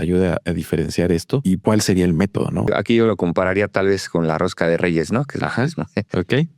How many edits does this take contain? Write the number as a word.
two